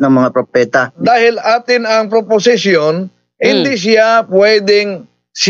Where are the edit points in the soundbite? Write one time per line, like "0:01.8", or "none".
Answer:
0:01.0